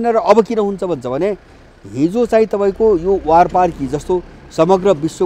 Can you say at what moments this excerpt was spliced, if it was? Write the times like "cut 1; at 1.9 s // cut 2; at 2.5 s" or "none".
none